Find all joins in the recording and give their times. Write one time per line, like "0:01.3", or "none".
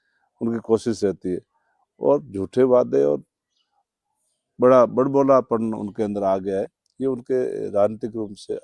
none